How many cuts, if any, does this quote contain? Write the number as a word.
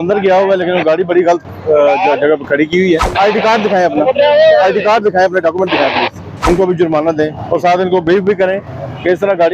two